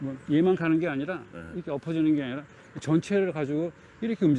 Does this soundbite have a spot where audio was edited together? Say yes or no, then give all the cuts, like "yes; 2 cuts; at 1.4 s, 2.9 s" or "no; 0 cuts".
no; 0 cuts